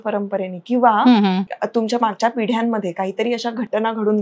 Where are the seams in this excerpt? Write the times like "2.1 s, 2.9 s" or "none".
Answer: 1.5 s